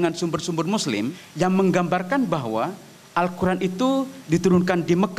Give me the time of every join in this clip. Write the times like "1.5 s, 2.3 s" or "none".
1.2 s